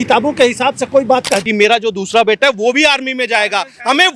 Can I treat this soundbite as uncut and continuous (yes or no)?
no